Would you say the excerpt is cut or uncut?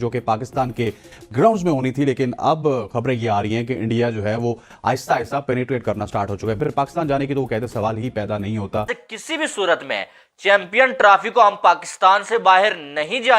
cut